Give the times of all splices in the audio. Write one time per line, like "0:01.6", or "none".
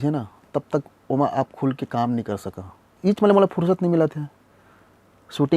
0:02.8